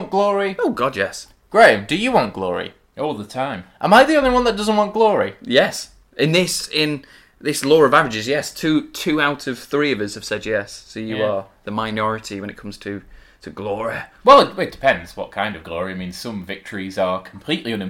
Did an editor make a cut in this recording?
no; 0 cuts

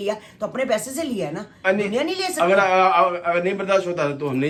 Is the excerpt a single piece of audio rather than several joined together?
yes; 0 cuts

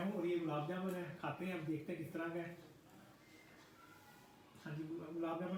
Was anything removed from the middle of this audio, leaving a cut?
no; 0 cuts

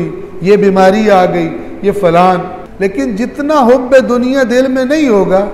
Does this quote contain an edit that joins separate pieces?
yes; 1 cut; at 2.6 s

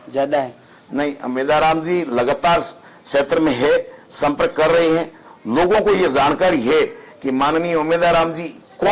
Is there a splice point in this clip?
no; 0 cuts

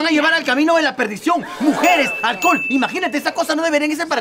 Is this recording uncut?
yes; 0 cuts

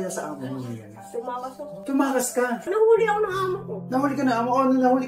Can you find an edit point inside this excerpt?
yes; 1 cut; at 2.6 s

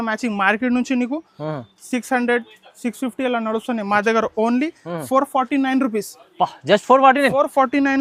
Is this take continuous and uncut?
yes; 0 cuts

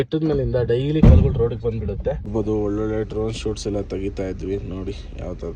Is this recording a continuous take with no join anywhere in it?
no; 1 cut; at 2.3 s

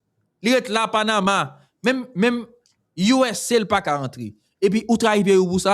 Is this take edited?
no; 0 cuts

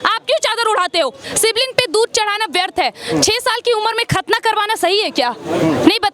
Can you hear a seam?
yes; 1 cut; at 1.2 s

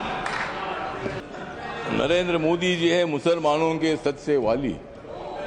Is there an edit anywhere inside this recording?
yes; 1 cut; at 1.2 s

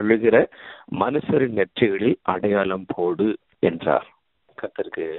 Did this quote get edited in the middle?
no; 0 cuts

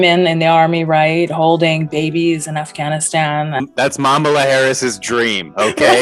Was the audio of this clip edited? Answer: no; 0 cuts

